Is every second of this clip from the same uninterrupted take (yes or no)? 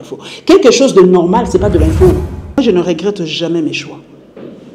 no